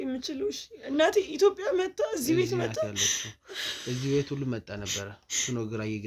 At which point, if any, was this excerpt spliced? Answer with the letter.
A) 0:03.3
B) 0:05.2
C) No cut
C